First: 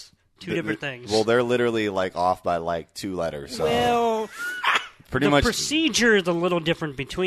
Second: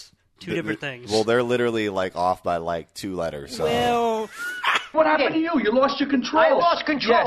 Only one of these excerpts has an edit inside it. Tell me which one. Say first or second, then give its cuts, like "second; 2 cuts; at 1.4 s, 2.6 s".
second; 1 cut; at 4.9 s